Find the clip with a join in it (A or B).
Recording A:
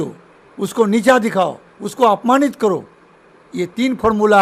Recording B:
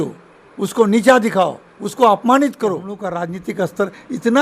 B